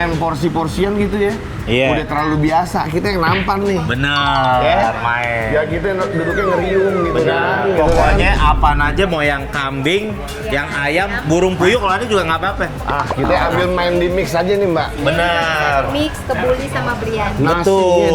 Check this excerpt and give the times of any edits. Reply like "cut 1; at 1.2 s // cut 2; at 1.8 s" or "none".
none